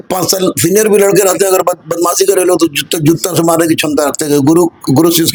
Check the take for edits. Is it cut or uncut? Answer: uncut